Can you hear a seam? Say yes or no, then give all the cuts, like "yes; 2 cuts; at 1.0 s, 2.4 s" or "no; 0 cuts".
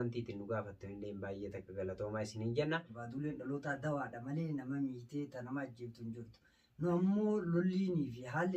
yes; 1 cut; at 3.0 s